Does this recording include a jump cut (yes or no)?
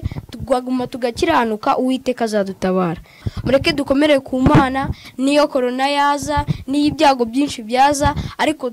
yes